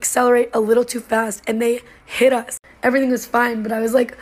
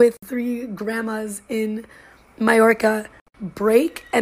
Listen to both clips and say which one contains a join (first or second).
first